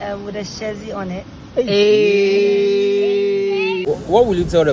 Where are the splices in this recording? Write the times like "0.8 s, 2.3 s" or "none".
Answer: 3.8 s